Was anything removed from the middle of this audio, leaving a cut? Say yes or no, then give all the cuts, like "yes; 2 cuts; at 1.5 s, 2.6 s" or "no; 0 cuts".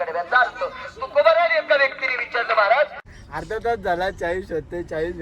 yes; 1 cut; at 3.0 s